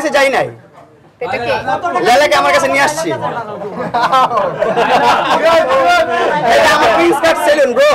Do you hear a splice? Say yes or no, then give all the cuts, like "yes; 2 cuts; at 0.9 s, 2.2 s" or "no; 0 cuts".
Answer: no; 0 cuts